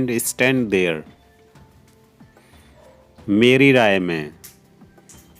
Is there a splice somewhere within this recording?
yes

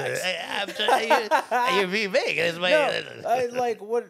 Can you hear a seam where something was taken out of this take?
no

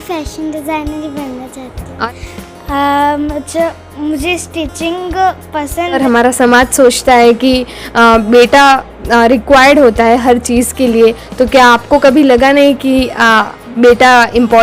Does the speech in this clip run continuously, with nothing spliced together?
no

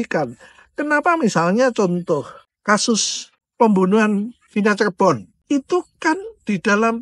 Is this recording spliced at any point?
no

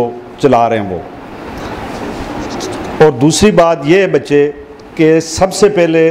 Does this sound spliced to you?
no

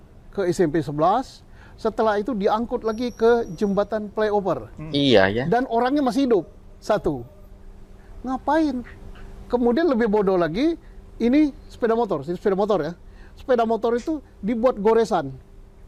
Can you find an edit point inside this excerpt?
no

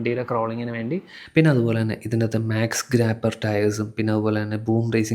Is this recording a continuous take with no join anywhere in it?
no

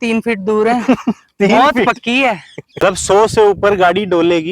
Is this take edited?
yes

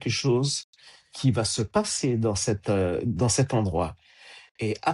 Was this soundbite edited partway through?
no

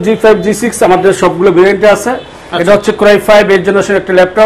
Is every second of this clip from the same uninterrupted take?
yes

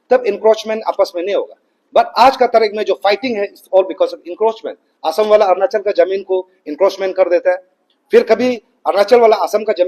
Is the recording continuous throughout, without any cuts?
yes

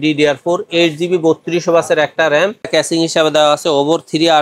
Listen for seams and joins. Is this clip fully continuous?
no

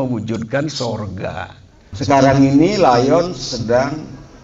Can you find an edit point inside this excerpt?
yes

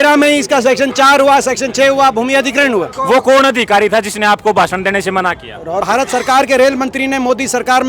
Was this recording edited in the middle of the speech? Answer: yes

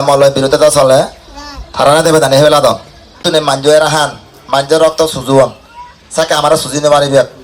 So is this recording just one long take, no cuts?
no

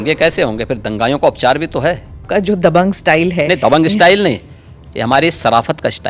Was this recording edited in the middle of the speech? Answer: yes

